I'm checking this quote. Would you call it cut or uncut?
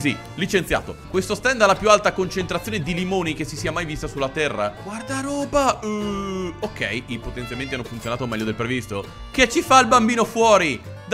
cut